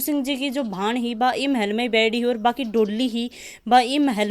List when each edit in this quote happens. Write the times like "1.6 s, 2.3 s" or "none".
none